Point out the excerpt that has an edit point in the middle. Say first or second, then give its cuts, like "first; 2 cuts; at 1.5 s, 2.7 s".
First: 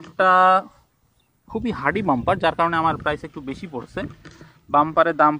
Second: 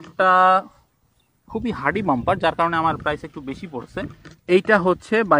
second; 1 cut; at 4.3 s